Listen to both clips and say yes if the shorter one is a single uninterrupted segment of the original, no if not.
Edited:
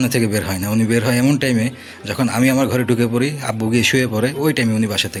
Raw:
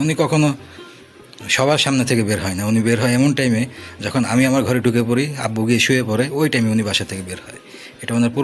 yes